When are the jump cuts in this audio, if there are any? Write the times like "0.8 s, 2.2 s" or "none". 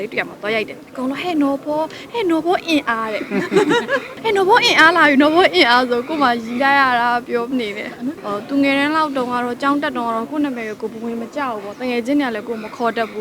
4.1 s, 8.2 s